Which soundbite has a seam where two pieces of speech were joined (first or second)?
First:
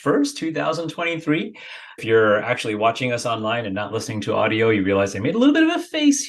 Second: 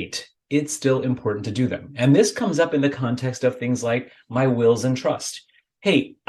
first